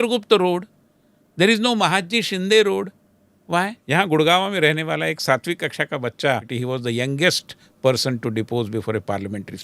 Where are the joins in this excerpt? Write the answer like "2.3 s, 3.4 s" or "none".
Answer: 3.8 s, 6.5 s